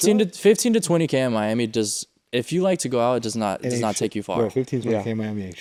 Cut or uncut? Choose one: uncut